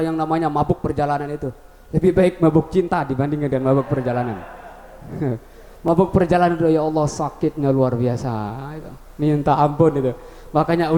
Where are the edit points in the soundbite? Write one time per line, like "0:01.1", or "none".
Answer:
none

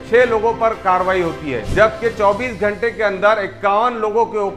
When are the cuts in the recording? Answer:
0:01.6

